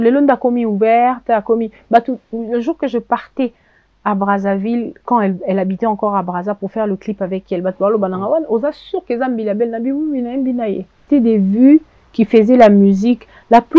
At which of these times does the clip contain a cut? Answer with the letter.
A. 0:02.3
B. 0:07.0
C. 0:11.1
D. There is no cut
C